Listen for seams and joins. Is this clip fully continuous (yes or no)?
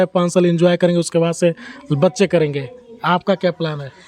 yes